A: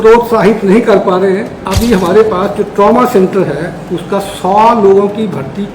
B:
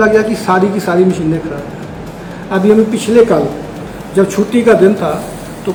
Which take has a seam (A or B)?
A